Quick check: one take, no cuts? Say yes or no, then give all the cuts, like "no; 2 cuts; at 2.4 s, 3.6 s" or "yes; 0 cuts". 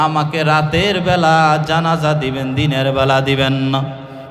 yes; 0 cuts